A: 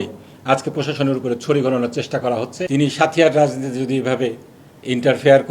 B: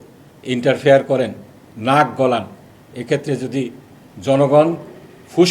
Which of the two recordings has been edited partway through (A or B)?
A